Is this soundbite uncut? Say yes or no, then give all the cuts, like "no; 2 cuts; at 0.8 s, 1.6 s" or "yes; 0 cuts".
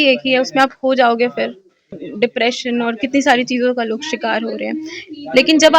no; 1 cut; at 2.0 s